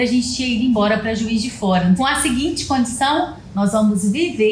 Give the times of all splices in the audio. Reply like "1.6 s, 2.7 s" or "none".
2.0 s